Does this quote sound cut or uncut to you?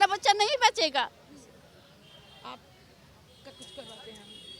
uncut